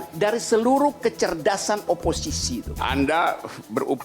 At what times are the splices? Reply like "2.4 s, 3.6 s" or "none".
2.8 s